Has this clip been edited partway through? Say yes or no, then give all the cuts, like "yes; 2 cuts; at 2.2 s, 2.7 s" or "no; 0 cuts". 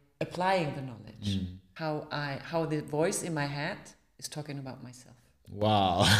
yes; 1 cut; at 1.6 s